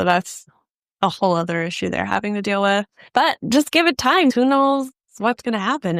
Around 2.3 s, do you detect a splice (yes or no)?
no